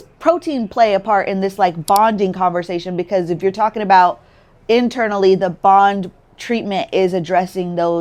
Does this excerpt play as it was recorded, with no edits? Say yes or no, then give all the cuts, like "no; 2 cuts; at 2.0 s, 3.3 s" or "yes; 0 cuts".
yes; 0 cuts